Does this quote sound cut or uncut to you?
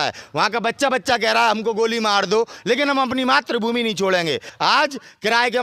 cut